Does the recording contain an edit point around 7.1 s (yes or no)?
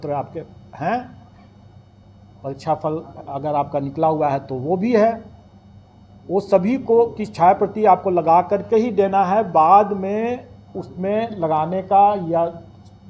no